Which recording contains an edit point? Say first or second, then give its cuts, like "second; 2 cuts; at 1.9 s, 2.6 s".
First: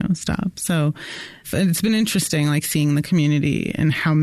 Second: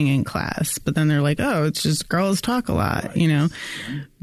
first; 1 cut; at 1.5 s